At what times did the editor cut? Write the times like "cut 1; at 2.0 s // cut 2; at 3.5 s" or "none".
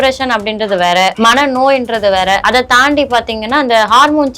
cut 1; at 1.1 s // cut 2; at 2.4 s